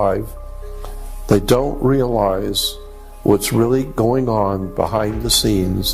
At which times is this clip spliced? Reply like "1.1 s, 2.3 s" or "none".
none